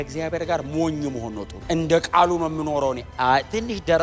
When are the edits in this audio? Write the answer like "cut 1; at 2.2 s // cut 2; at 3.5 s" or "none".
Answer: cut 1; at 1.5 s